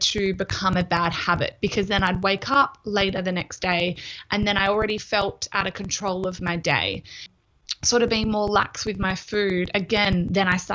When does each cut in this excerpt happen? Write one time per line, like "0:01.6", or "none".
0:07.2